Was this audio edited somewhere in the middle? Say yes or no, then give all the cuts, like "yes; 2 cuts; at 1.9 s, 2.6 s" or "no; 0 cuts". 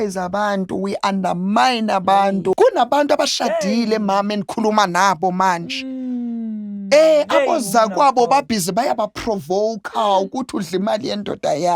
yes; 1 cut; at 2.6 s